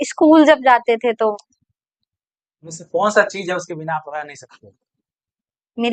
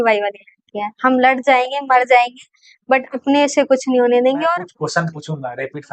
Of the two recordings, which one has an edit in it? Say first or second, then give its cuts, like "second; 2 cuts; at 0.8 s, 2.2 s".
second; 1 cut; at 4.5 s